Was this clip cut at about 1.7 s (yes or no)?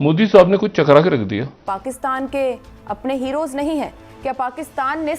yes